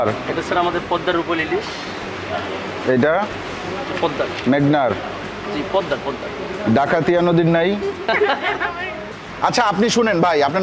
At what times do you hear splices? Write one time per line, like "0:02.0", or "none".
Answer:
0:09.1